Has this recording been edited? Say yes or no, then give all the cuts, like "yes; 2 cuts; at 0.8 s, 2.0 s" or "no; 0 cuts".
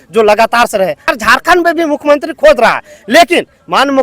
yes; 1 cut; at 1.0 s